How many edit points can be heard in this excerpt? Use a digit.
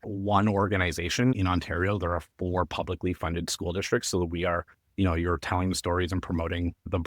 1